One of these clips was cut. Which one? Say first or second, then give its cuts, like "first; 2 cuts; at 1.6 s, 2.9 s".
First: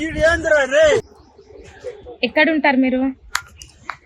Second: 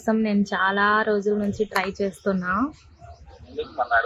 first; 1 cut; at 1.2 s